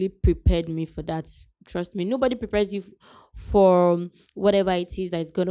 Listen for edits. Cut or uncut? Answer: uncut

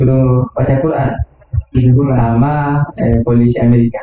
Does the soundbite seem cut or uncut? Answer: uncut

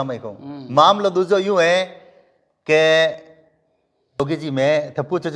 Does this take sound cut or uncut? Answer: cut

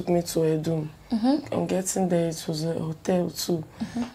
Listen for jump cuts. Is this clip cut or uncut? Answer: uncut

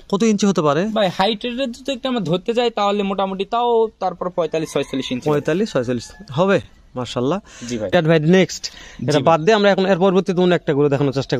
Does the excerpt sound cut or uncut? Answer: uncut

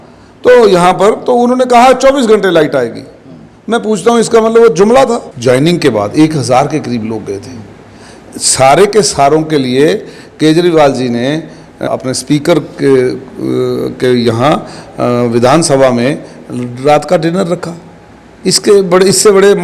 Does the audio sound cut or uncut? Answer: cut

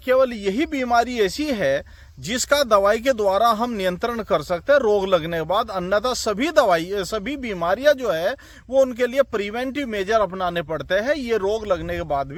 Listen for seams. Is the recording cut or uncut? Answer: uncut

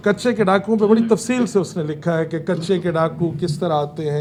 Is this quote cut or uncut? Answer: uncut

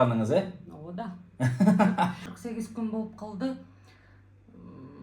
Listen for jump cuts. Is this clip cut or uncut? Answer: cut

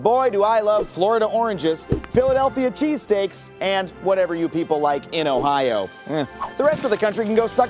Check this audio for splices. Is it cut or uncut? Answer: uncut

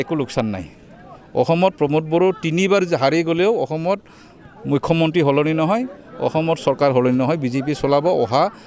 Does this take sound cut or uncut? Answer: uncut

